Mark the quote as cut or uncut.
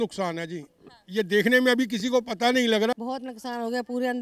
cut